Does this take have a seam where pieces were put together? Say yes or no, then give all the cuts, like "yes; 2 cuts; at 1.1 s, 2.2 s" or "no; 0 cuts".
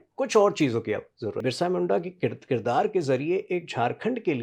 yes; 1 cut; at 1.5 s